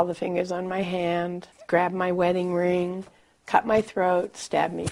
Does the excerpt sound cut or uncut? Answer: uncut